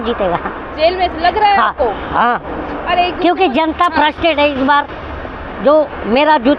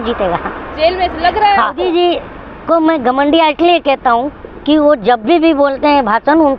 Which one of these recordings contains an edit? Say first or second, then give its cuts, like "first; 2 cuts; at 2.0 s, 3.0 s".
second; 1 cut; at 1.8 s